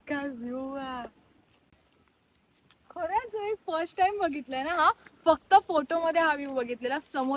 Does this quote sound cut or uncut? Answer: uncut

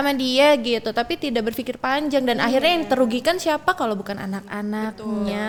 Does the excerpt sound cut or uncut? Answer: uncut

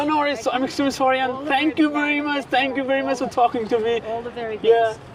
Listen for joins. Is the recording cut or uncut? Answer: uncut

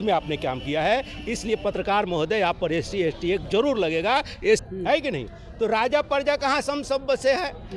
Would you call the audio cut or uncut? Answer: cut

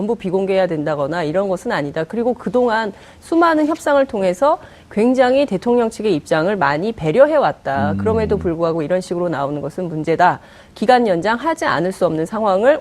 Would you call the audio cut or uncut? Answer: cut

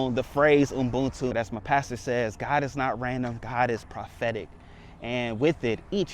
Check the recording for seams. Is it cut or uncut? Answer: cut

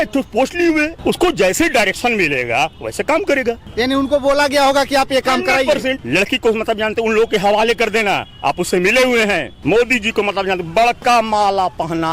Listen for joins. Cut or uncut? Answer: cut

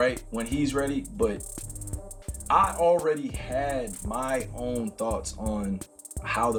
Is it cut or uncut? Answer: uncut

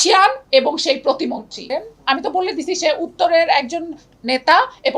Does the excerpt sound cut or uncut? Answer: cut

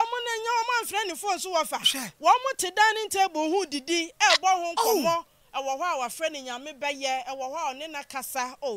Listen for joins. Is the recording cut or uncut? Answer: uncut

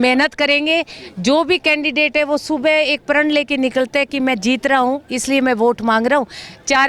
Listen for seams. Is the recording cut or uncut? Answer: uncut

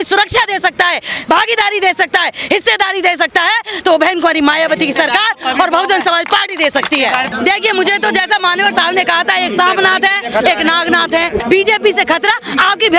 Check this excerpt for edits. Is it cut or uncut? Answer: cut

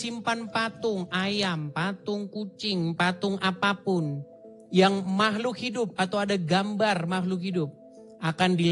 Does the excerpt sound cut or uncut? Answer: uncut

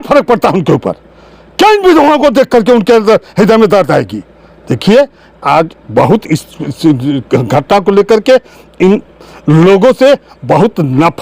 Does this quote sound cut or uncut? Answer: uncut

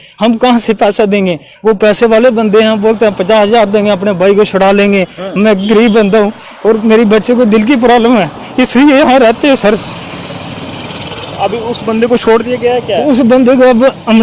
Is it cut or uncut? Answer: uncut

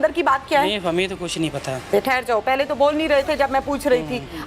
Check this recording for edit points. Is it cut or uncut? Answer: cut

